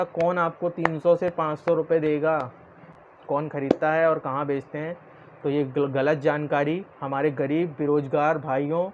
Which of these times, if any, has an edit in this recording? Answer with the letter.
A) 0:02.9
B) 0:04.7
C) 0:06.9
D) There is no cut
A